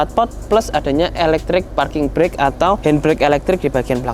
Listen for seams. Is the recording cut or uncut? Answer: cut